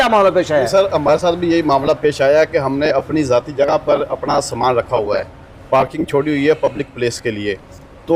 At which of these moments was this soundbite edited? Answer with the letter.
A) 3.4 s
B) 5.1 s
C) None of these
C